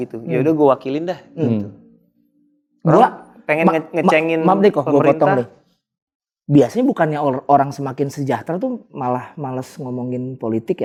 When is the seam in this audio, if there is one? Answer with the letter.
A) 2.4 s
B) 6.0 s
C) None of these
C